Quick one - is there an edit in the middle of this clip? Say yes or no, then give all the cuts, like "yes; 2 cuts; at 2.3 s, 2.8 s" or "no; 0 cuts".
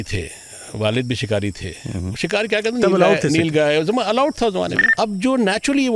yes; 1 cut; at 4.8 s